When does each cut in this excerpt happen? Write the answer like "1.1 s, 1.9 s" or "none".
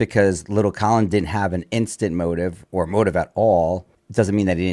none